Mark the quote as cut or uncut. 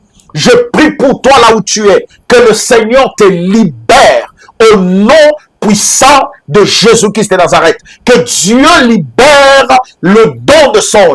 uncut